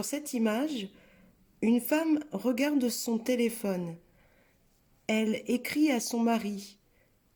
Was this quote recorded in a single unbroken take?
yes; 0 cuts

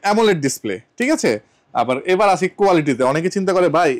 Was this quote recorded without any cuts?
yes; 0 cuts

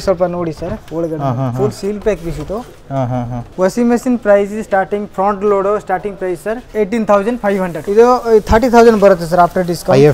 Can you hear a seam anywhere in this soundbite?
yes; 3 cuts; at 3.4 s, 6.6 s, 7.8 s

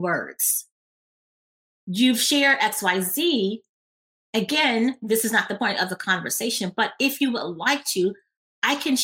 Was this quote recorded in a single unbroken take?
no; 1 cut; at 5.6 s

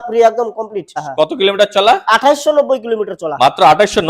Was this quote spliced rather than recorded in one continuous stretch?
yes; 1 cut; at 0.9 s

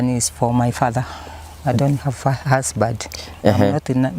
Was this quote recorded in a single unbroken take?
no; 1 cut; at 3.3 s

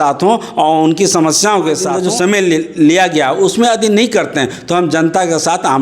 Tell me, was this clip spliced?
yes; 1 cut; at 2.0 s

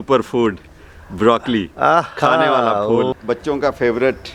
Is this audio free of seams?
no; 1 cut; at 3.1 s

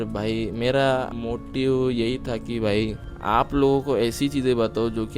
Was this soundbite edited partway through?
yes; 2 cuts; at 1.1 s, 3.1 s

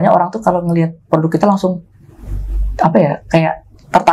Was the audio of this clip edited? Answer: no; 0 cuts

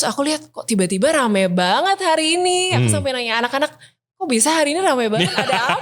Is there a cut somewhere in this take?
no; 0 cuts

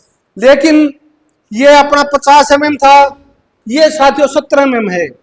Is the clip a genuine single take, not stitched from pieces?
yes; 0 cuts

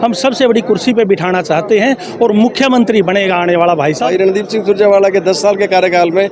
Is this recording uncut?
no; 1 cut; at 4.0 s

